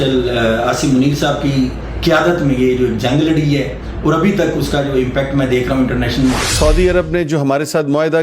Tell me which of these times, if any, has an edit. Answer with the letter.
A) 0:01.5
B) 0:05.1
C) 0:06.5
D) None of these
C